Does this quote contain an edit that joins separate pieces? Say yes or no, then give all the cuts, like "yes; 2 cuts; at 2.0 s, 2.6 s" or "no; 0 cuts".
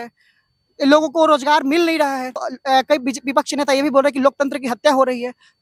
no; 0 cuts